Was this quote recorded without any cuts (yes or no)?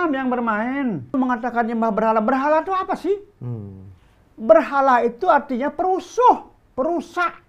no